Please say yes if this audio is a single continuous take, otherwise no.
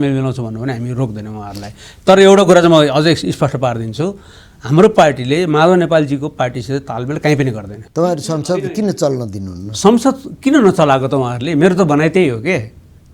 no